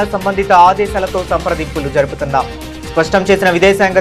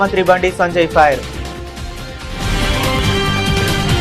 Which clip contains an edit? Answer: second; 1 cut; at 3.0 s

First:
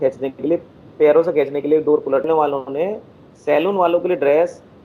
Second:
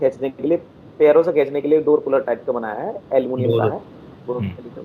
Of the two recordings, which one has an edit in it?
first; 1 cut; at 2.3 s

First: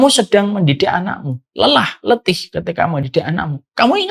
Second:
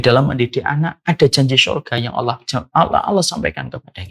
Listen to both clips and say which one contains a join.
second; 1 cut; at 1.0 s

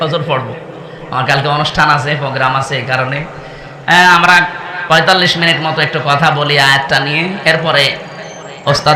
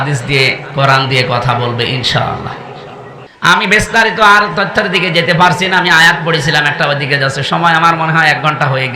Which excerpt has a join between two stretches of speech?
second; 1 cut; at 3.2 s

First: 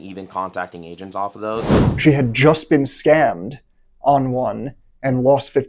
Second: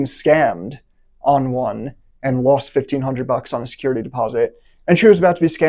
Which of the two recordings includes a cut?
first; 1 cut; at 1.8 s

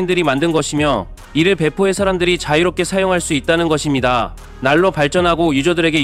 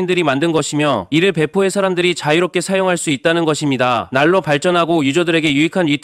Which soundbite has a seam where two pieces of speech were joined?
second; 2 cuts; at 1.0 s, 4.1 s

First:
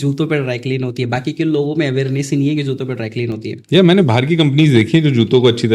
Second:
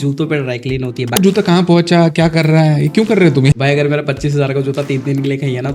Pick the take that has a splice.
second; 2 cuts; at 1.2 s, 3.5 s

